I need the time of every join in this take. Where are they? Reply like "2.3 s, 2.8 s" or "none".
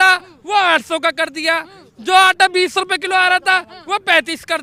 none